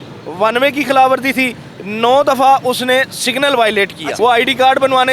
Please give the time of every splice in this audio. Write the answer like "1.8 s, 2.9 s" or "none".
4.0 s

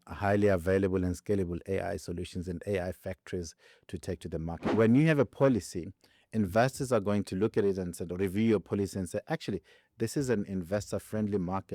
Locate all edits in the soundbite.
4.6 s

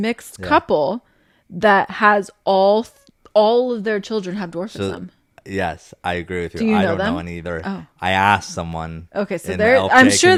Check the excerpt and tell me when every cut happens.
none

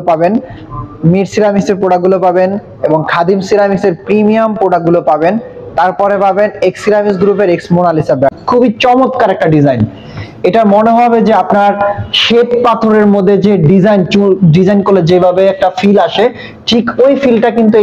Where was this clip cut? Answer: 8.3 s

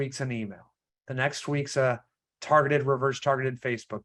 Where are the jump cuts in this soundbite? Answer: none

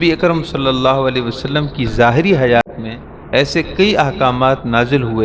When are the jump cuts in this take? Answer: 2.6 s

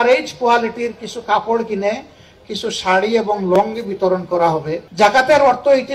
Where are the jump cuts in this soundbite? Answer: 4.9 s

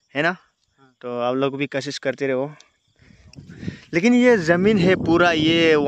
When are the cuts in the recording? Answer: 3.4 s

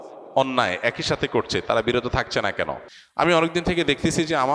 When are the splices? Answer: 3.0 s

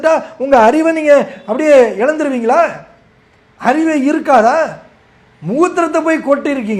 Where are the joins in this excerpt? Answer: none

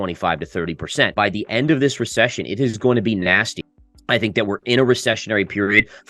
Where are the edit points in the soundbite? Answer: 1.1 s, 3.6 s

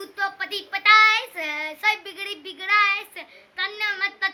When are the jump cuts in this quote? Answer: none

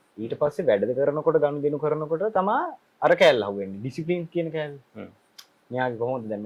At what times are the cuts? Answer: none

